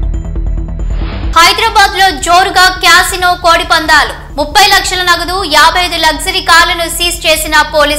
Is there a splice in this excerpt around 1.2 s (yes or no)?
yes